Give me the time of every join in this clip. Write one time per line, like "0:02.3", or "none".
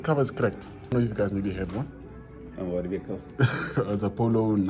0:00.9